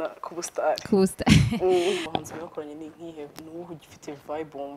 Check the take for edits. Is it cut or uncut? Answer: cut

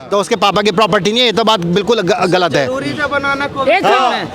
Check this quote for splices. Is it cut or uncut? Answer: uncut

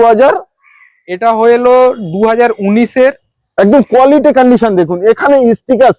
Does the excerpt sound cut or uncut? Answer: uncut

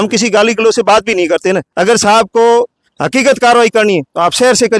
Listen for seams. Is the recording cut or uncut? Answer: cut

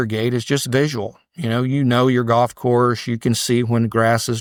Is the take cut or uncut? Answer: uncut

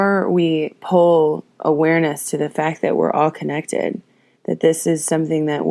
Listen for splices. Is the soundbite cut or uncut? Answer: uncut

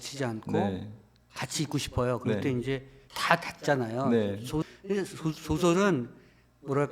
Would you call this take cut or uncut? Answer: cut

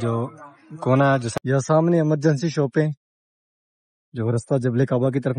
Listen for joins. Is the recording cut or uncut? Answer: cut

